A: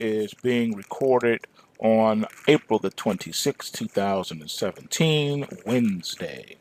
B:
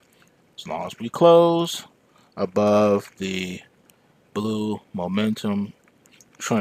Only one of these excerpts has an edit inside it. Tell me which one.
B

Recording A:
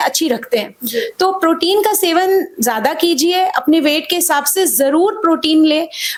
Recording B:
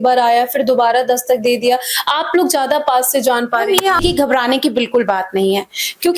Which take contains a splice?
B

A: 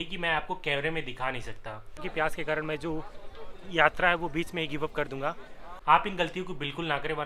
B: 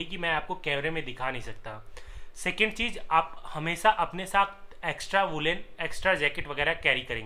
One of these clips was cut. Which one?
A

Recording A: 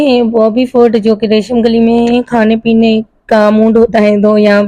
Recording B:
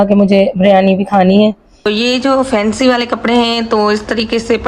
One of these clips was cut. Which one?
B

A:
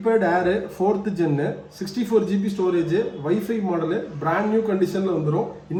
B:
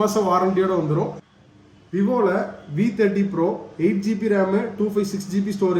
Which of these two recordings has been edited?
B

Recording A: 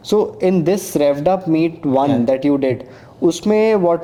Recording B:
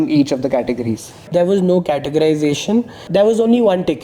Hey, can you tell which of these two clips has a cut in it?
B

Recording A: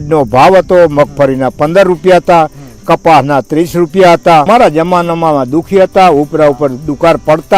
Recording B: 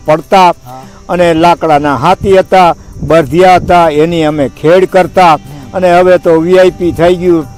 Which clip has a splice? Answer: A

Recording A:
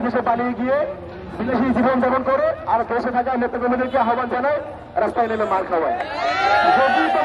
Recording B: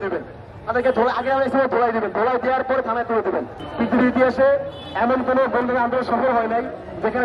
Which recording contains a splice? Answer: B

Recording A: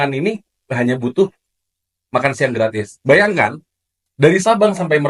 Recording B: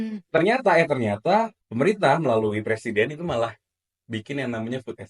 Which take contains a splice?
B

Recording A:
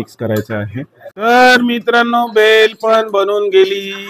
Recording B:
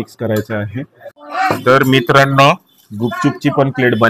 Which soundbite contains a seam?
B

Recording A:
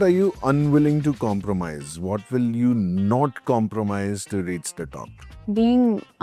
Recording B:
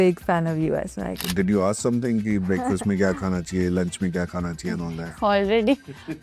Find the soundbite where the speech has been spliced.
B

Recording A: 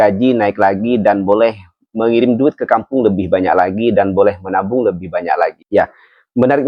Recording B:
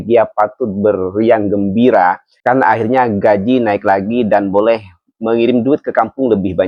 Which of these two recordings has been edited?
A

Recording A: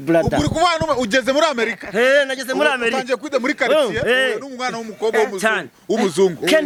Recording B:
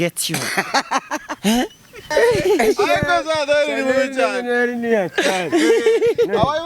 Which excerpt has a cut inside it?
B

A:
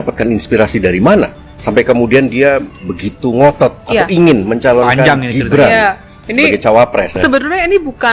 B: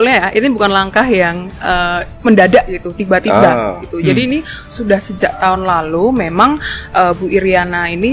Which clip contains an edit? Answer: A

